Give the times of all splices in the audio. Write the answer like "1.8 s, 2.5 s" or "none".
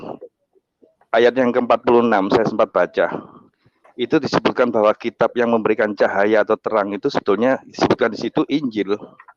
none